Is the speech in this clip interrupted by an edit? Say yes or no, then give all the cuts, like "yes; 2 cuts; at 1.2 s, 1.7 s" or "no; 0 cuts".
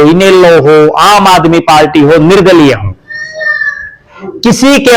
no; 0 cuts